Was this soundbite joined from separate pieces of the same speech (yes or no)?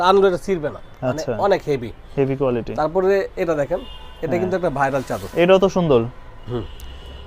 no